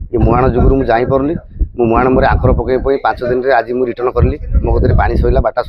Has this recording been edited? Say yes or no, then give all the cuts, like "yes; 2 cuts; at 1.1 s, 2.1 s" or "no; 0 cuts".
no; 0 cuts